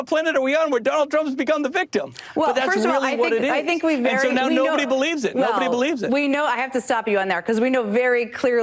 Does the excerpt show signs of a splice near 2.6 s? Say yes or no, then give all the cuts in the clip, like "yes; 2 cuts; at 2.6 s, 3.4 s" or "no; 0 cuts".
yes; 1 cut; at 2.6 s